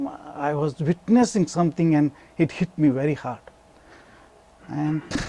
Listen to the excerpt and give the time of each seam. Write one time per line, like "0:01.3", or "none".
none